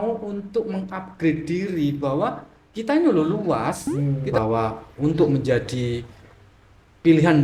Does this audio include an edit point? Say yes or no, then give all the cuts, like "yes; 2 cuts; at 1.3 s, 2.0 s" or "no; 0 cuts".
yes; 1 cut; at 4.4 s